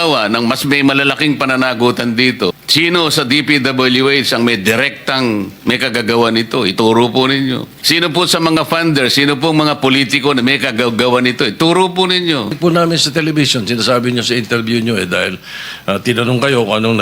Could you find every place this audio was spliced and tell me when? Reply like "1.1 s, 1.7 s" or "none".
2.6 s, 7.7 s, 12.6 s